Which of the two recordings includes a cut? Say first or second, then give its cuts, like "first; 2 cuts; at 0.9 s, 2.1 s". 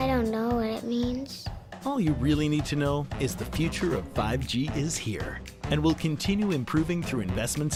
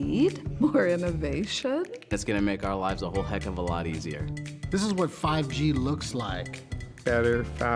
second; 1 cut; at 1.1 s